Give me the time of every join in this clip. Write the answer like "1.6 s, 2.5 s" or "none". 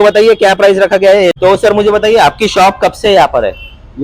1.3 s